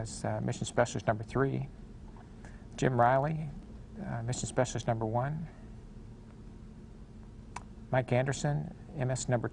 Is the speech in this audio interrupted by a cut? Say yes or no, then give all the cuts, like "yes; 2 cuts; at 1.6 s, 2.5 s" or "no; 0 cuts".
no; 0 cuts